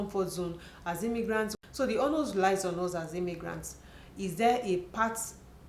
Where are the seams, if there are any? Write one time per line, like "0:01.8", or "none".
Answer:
0:01.5